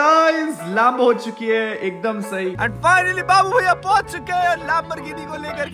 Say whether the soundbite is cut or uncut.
cut